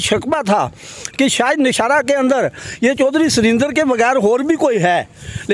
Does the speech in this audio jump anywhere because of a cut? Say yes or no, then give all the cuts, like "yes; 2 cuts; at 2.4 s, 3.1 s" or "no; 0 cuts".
no; 0 cuts